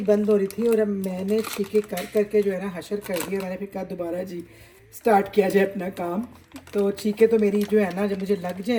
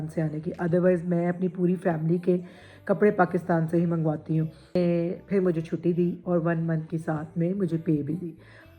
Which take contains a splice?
second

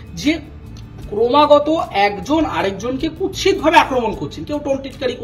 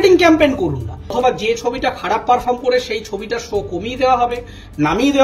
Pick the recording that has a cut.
second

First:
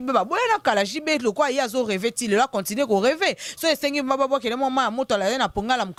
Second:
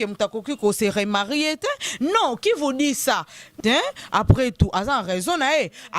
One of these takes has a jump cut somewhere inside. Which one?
second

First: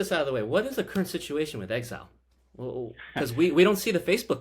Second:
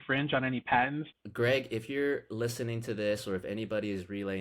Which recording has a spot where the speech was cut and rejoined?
second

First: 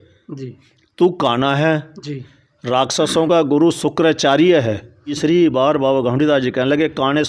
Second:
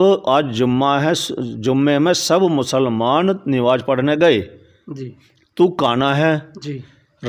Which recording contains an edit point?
first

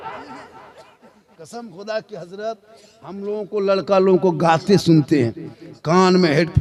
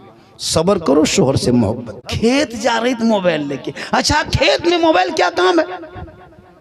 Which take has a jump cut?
second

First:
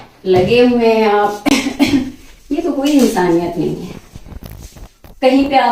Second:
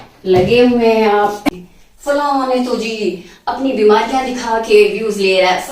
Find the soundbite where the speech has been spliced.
second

